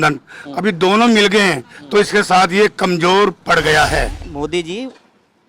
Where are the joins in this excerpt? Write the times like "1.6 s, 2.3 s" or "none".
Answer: 4.2 s